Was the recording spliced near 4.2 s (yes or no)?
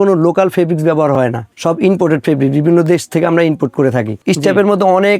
yes